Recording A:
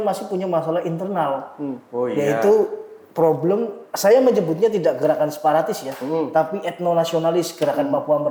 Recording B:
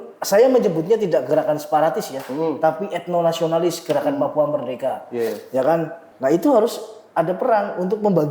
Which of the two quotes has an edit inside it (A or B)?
B